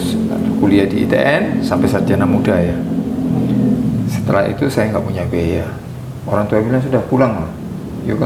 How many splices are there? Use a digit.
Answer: 0